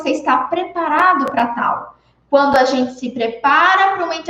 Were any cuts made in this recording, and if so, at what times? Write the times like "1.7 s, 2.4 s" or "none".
none